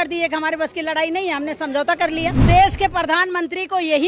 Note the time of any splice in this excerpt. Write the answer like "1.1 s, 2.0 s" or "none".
2.4 s